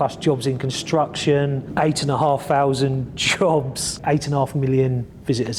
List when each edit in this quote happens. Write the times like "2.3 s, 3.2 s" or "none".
1.6 s, 4.0 s